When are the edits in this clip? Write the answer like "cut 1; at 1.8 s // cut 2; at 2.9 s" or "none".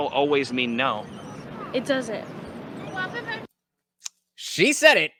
none